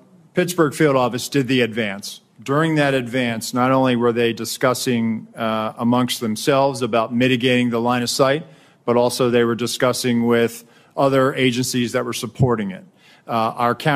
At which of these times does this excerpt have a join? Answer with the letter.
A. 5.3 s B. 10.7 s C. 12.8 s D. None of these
D